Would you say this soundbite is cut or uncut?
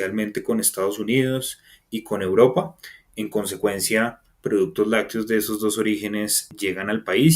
cut